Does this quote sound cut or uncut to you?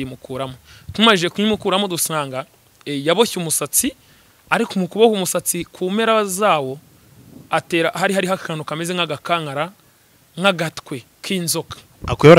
uncut